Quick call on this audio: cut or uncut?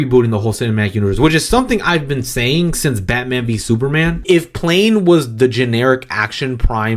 cut